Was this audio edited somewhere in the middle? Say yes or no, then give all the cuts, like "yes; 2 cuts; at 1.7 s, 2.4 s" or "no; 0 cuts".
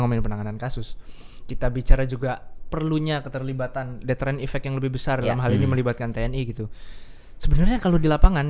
no; 0 cuts